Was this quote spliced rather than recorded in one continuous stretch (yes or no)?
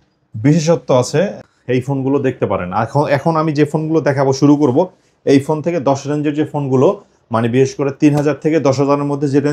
yes